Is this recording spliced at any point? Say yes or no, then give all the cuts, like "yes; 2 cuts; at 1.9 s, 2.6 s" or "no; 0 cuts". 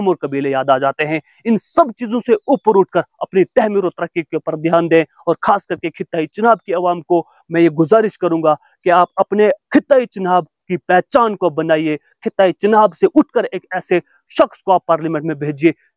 no; 0 cuts